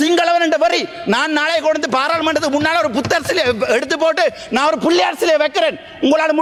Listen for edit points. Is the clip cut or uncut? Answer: uncut